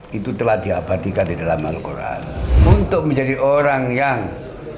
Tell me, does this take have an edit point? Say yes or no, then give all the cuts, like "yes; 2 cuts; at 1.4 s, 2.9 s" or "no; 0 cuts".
yes; 1 cut; at 2.5 s